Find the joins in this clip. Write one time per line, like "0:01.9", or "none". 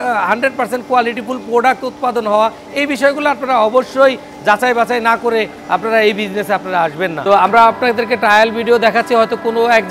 0:07.2